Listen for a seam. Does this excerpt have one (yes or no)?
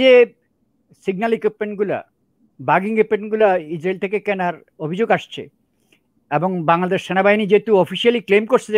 no